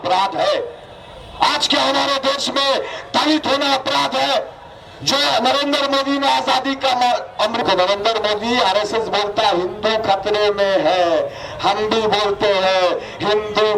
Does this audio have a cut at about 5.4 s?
no; 1 cut; at 7.6 s

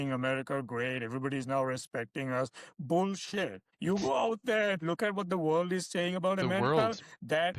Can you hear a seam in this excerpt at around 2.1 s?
no; 1 cut; at 3.7 s

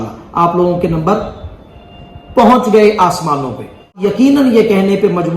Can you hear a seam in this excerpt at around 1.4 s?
no; 1 cut; at 3.9 s

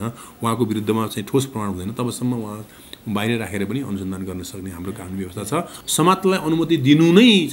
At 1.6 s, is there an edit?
no; 1 cut; at 5.8 s

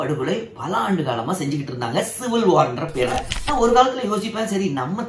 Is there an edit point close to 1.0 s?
no; 1 cut; at 3.4 s

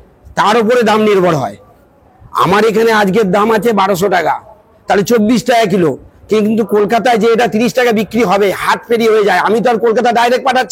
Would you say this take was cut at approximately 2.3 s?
no; 0 cuts

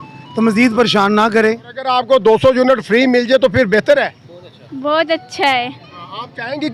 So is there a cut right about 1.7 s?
yes; 1 cut; at 1.7 s

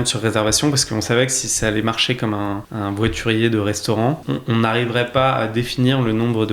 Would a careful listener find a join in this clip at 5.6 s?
no; 2 cuts; at 2.7 s, 4.2 s

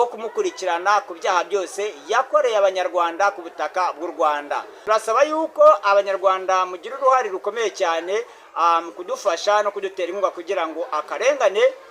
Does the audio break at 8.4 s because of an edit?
no; 1 cut; at 4.7 s

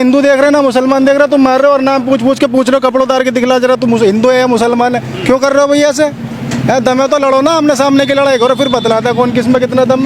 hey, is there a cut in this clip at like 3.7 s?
no; 0 cuts

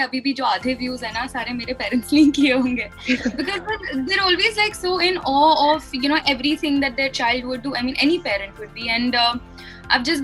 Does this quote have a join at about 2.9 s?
no; 0 cuts

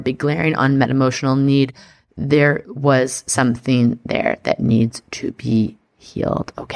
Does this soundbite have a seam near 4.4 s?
no; 1 cut; at 2.7 s

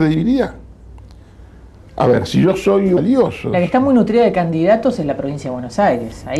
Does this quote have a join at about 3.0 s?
no; 0 cuts

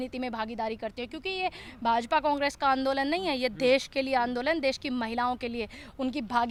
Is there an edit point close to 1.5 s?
no; 0 cuts

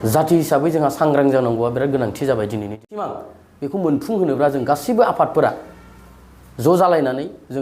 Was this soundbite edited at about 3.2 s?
yes; 1 cut; at 3.2 s

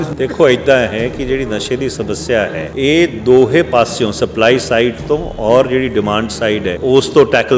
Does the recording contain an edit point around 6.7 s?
yes; 2 cuts; at 2.6 s, 6.7 s

